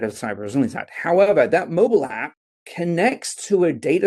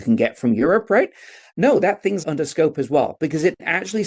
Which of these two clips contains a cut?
second; 2 cuts; at 1.5 s, 2.2 s

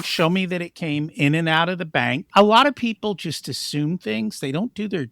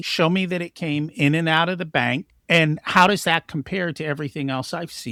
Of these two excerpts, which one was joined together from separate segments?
first; 1 cut; at 2.2 s

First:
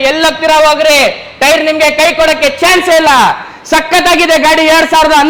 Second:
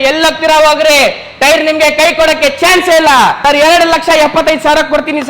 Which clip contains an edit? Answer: second; 1 cut; at 3.4 s

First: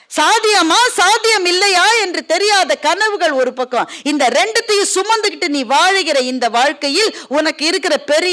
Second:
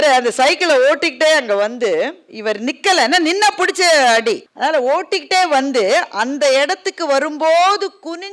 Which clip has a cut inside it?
second; 2 cuts; at 2.3 s, 4.5 s

